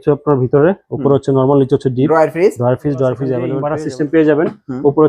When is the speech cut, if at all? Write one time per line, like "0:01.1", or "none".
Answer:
0:03.5

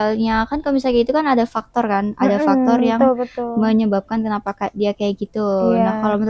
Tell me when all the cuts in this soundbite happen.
none

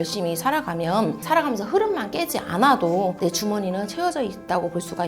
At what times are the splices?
0:01.2
0:03.2

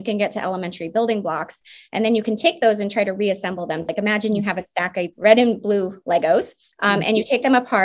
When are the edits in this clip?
0:03.9
0:05.1
0:06.6

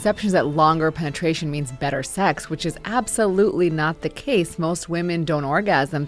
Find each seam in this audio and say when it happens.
none

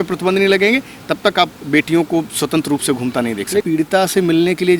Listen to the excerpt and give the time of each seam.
0:03.6

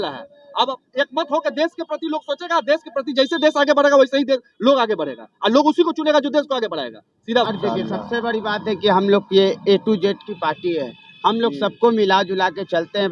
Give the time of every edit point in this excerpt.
0:07.4

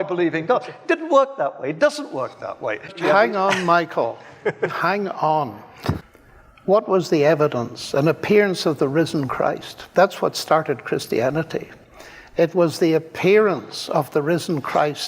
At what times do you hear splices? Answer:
0:03.0
0:06.1

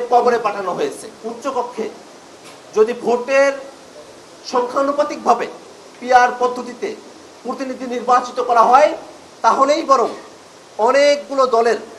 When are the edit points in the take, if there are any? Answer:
0:01.1

